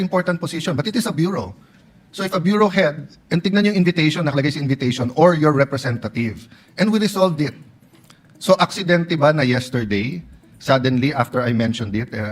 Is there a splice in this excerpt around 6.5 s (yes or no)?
no